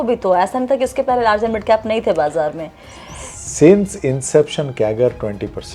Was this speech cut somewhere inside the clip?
no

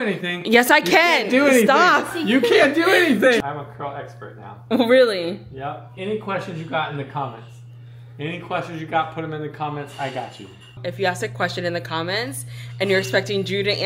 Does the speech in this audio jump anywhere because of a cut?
yes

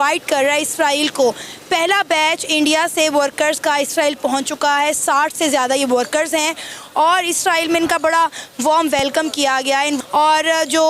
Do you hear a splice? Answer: yes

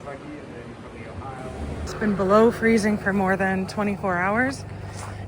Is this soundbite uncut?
no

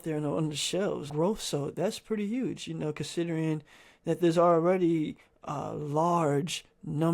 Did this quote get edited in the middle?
yes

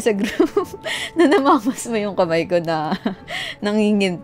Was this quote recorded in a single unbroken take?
yes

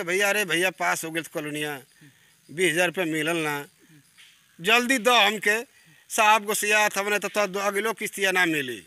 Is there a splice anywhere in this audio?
no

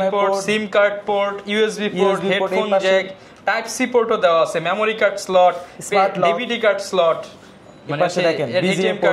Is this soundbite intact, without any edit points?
yes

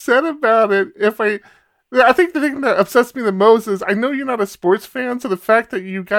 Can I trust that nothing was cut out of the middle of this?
yes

